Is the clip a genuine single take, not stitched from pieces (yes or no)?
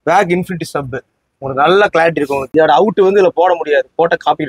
no